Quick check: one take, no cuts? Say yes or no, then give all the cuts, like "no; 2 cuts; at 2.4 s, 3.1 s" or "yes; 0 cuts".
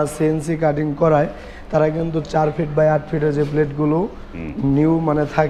yes; 0 cuts